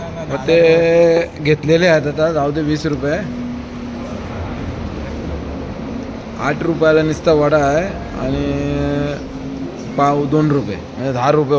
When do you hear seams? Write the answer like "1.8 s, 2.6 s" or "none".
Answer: none